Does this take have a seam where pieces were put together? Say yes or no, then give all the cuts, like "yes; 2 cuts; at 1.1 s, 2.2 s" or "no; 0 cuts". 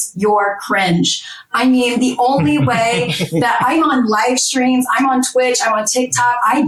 no; 0 cuts